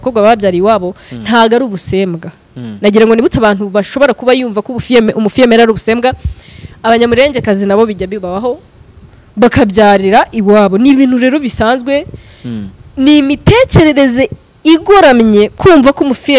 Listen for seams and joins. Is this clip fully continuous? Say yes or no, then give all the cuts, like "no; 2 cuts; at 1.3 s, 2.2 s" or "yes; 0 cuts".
yes; 0 cuts